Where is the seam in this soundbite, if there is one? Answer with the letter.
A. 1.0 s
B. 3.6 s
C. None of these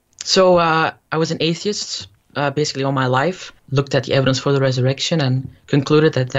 B